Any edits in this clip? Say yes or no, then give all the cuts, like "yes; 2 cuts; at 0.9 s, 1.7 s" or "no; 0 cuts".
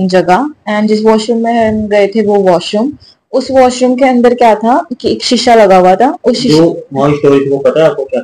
no; 0 cuts